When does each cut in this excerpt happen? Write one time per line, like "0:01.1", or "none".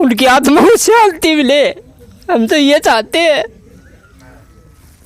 none

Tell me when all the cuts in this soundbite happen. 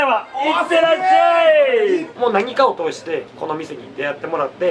0:02.1

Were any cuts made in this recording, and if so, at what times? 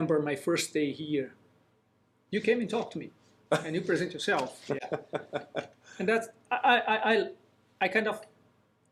none

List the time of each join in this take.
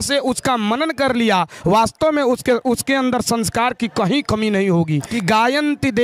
0:05.1

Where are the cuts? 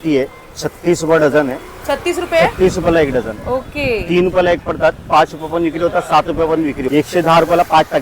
0:06.9

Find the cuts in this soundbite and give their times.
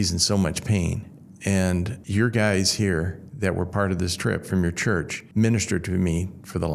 0:02.0
0:05.2

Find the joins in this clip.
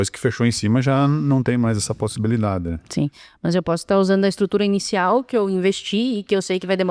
none

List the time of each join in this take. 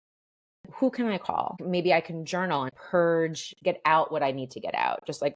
0:01.6
0:02.7

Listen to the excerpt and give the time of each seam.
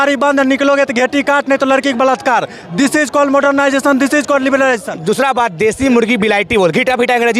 0:04.9

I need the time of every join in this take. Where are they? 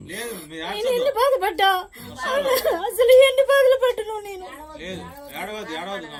none

